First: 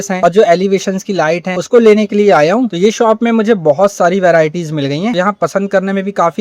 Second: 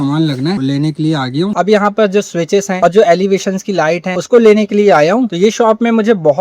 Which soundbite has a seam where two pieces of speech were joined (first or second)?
second